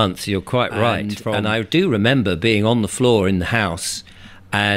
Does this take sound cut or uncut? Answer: cut